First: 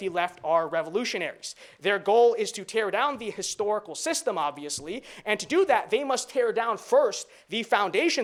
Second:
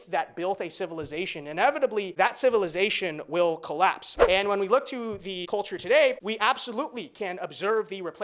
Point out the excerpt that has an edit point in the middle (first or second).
second